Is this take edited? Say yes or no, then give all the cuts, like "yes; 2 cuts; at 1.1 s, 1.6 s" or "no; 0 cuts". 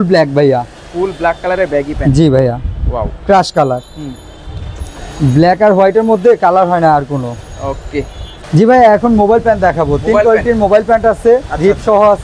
no; 0 cuts